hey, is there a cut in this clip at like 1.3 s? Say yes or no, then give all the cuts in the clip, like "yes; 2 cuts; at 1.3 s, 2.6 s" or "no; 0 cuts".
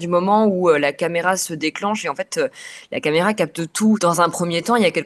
no; 1 cut; at 4.0 s